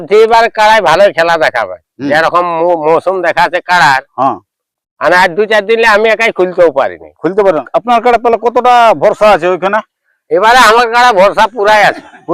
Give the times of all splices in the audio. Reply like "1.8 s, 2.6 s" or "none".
7.7 s